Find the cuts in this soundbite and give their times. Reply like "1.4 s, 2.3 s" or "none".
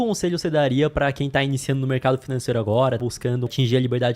3.0 s